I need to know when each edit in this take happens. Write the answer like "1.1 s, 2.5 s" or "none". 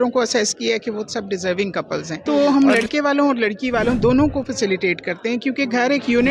2.1 s